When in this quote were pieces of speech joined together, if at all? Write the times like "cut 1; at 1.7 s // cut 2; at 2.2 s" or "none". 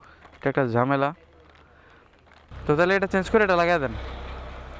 cut 1; at 2.5 s

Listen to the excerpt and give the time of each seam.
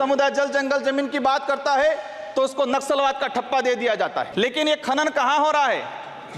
cut 1; at 4.3 s

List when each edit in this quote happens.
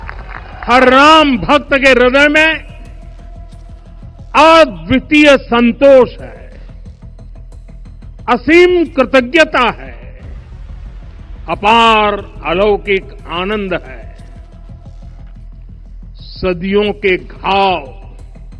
cut 1; at 14.0 s // cut 2; at 16.4 s

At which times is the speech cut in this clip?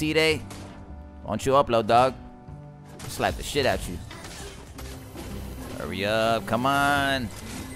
none

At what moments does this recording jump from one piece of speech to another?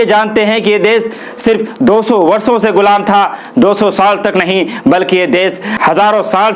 none

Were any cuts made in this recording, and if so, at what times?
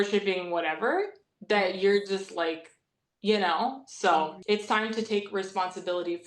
cut 1; at 4.4 s

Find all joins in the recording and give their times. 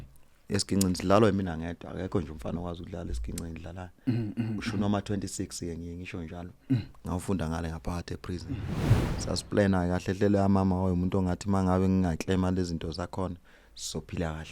cut 1; at 8.8 s

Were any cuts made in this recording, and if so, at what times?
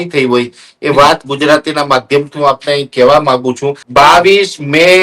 cut 1; at 3.8 s

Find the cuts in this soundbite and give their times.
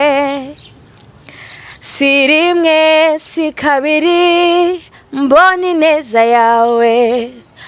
none

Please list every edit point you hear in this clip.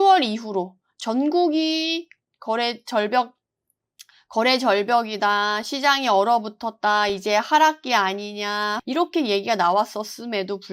cut 1; at 8.8 s

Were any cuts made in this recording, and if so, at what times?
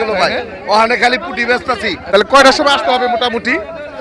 cut 1; at 2.0 s

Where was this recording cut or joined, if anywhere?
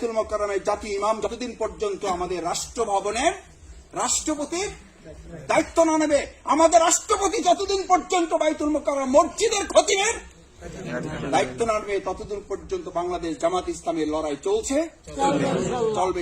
cut 1; at 1.3 s

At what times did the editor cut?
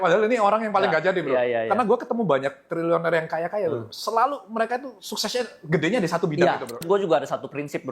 cut 1; at 6.8 s

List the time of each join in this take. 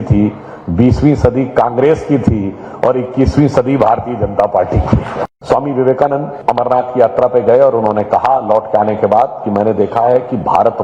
cut 1; at 5.2 s // cut 2; at 6.3 s

